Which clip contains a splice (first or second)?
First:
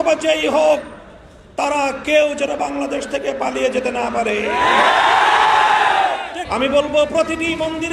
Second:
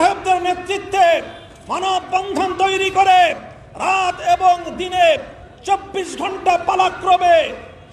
first